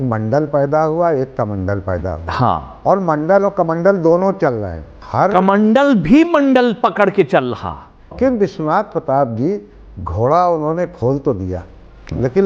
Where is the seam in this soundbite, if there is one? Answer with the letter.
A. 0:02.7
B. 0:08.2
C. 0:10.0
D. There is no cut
B